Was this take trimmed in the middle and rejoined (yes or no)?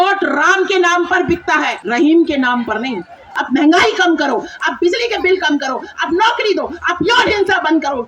yes